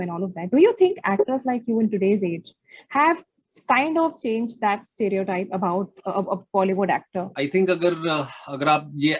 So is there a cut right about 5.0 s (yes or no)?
no